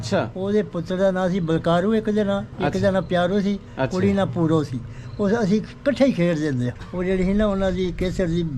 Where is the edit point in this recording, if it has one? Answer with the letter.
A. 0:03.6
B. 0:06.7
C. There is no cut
B